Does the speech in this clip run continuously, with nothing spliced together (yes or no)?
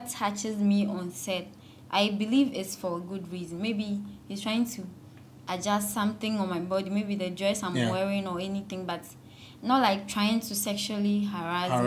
yes